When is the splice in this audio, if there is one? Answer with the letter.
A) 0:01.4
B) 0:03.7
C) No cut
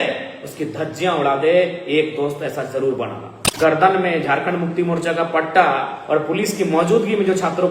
B